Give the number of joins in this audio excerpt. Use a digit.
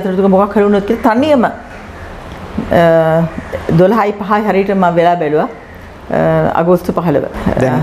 0